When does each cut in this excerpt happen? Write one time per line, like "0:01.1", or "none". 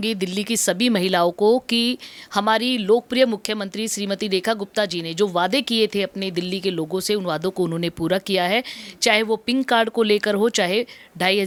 none